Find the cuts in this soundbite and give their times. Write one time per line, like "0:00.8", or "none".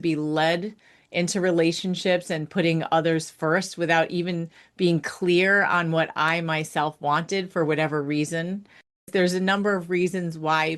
0:09.1